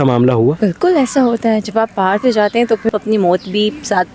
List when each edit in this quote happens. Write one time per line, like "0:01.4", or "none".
0:02.9

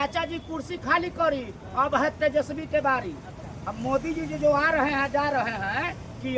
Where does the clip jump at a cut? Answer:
none

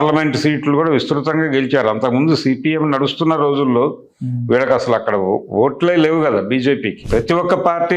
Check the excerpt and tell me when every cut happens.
0:06.9

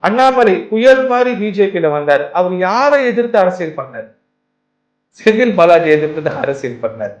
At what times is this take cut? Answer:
none

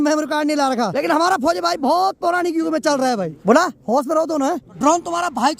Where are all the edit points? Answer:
0:00.9
0:03.4
0:04.8

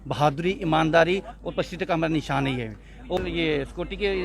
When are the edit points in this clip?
0:03.2

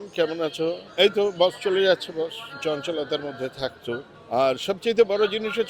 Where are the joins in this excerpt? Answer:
0:00.8
0:02.5
0:04.1

